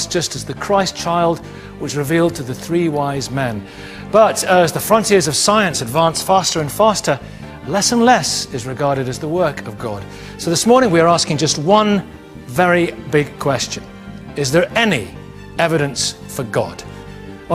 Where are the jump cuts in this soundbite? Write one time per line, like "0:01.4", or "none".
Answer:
0:15.4